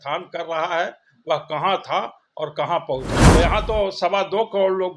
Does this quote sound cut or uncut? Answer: cut